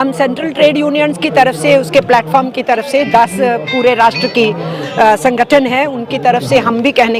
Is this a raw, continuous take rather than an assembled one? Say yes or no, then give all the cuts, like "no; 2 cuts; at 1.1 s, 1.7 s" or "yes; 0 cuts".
yes; 0 cuts